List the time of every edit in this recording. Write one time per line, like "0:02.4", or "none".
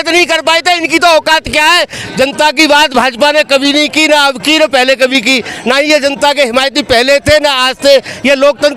0:02.0